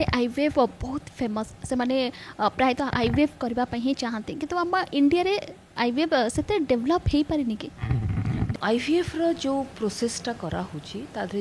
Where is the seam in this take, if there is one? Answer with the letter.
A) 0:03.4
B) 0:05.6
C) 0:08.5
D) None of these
C